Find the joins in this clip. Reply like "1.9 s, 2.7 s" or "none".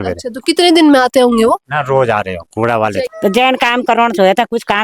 3.1 s

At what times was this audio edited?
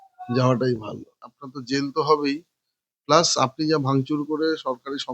1.2 s

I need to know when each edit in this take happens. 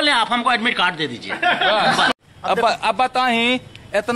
2.1 s

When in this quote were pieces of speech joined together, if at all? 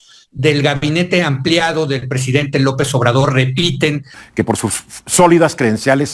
4.2 s

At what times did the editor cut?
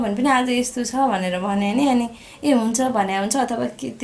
none

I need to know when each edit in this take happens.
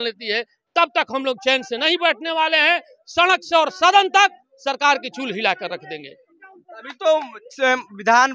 none

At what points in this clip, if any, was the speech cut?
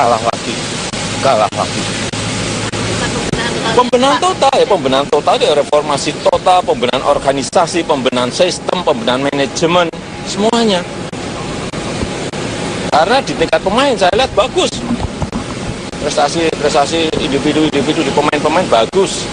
3.9 s

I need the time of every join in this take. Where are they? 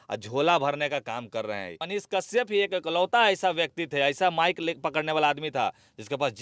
1.8 s

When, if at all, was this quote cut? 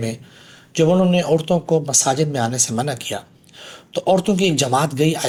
none

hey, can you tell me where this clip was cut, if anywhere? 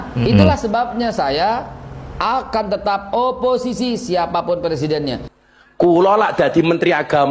5.3 s

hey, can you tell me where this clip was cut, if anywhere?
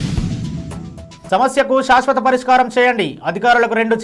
1.1 s

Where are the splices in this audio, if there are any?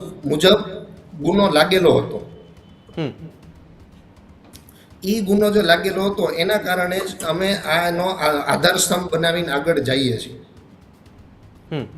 none

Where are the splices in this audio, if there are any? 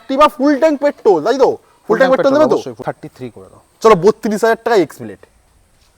2.8 s

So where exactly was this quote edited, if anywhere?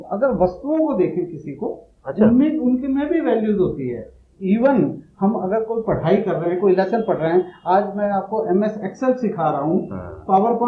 none

